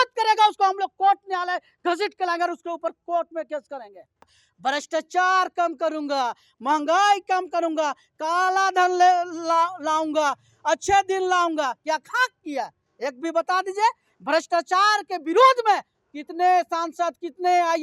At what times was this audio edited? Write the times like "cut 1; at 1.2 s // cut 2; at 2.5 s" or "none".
cut 1; at 4.3 s